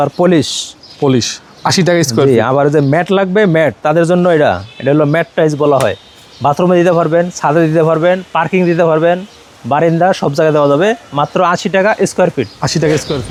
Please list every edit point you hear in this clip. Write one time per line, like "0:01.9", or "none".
none